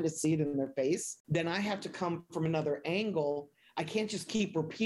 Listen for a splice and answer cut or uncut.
cut